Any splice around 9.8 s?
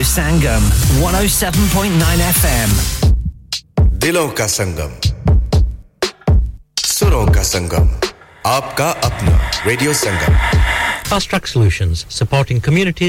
no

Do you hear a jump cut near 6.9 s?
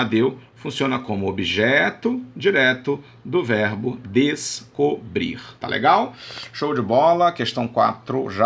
no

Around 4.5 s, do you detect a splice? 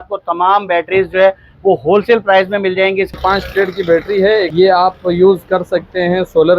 yes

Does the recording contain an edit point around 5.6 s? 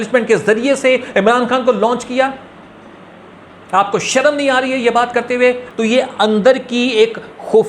yes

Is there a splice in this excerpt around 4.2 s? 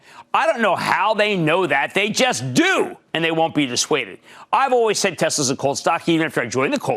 no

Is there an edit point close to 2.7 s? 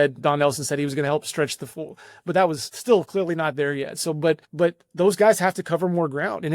yes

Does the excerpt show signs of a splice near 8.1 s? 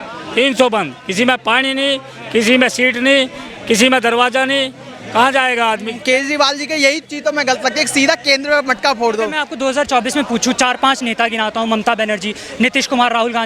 no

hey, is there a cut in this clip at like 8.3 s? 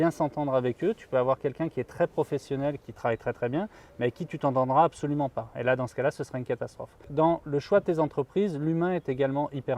no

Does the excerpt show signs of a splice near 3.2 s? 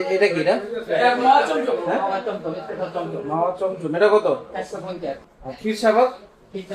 no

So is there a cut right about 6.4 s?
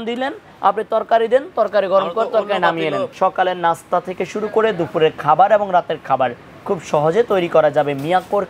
no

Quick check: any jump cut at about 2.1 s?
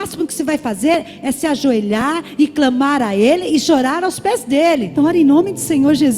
no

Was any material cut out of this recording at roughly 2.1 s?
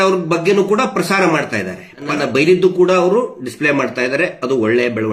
yes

